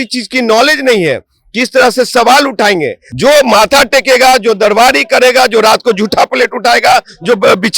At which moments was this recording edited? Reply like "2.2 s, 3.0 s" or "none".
3.1 s

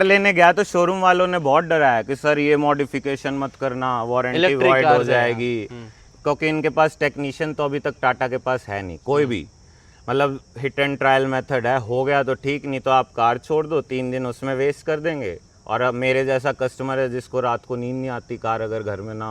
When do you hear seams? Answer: none

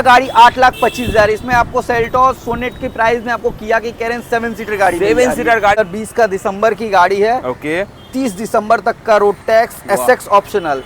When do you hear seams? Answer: 5.8 s

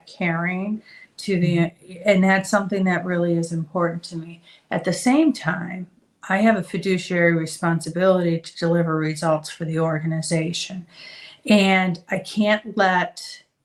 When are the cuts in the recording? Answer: none

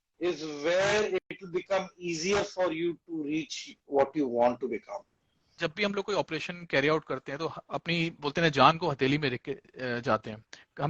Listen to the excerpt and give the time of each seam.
5.6 s

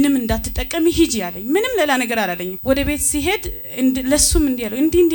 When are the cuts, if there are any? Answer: 2.5 s

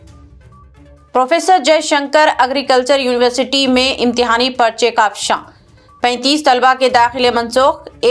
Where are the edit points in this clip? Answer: 0.9 s

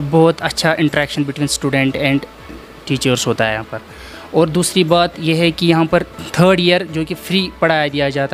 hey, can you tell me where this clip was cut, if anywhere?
none

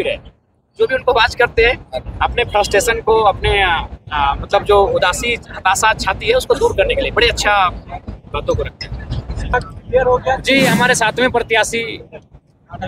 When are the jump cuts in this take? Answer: 9.5 s

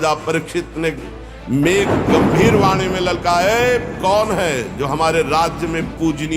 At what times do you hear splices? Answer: none

